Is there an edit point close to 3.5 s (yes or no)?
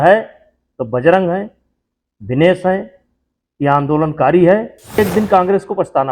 no